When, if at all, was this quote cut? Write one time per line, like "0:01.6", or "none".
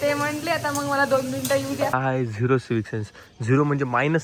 0:01.9